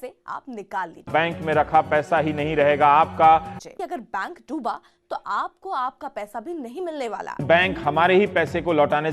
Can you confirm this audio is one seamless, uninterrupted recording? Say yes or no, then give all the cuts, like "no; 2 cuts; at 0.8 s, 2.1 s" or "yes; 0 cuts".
no; 3 cuts; at 1.1 s, 3.6 s, 7.4 s